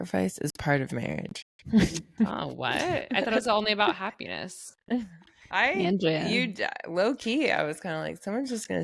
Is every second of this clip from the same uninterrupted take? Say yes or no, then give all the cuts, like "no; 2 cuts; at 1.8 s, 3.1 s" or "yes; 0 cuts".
yes; 0 cuts